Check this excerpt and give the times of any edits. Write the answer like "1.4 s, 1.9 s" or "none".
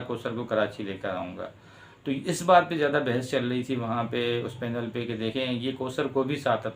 none